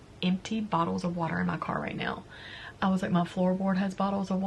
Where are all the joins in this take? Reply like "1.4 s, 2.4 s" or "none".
none